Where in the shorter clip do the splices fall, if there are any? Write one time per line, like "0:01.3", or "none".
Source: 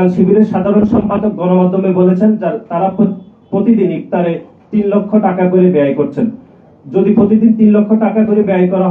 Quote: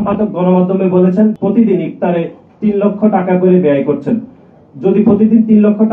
0:01.4